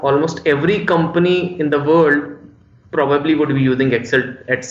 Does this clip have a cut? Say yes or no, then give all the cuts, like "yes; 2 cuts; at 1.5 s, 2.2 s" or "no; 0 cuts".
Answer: no; 0 cuts